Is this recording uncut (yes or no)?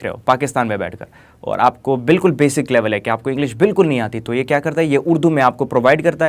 yes